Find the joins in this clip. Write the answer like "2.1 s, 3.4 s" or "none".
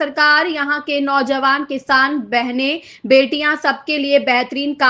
none